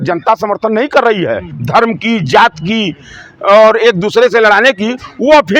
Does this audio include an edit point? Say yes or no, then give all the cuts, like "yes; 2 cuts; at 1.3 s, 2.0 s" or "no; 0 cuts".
yes; 1 cut; at 1.5 s